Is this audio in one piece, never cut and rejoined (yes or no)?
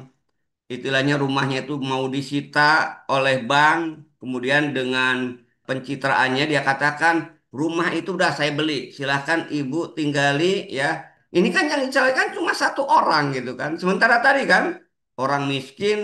no